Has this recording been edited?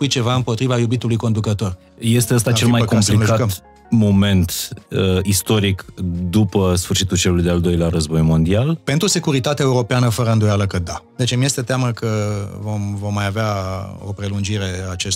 yes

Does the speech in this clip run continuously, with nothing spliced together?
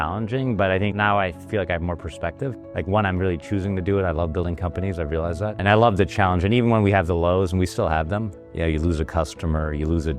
no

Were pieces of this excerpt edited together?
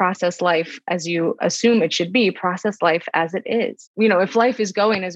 yes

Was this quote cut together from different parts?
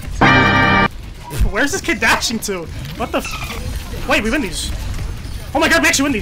no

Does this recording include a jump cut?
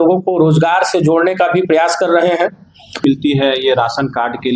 yes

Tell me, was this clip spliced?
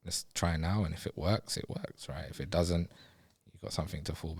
no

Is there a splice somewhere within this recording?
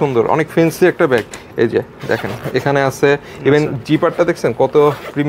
no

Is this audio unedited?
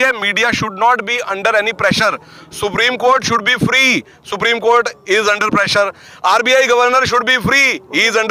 yes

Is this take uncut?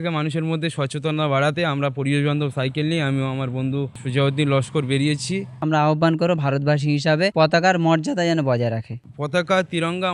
no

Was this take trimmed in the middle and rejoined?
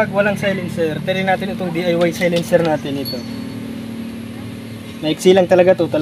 no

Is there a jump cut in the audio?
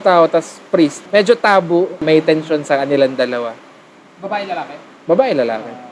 yes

